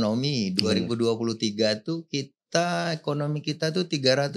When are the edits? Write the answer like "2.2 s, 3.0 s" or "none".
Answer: none